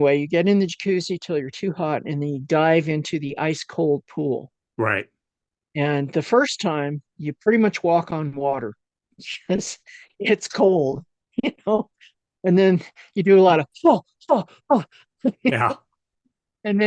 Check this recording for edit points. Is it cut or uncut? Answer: uncut